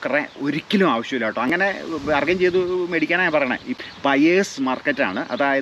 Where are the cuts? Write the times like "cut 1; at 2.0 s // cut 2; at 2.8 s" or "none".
cut 1; at 1.5 s // cut 2; at 3.7 s